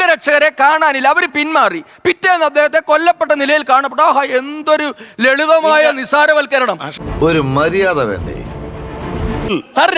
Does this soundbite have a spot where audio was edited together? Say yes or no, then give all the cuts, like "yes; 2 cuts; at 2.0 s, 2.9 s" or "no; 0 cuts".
no; 0 cuts